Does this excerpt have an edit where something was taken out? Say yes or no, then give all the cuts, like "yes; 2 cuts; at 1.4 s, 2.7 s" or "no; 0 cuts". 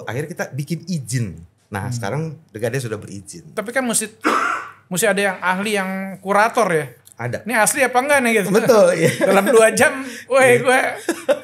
yes; 1 cut; at 3.4 s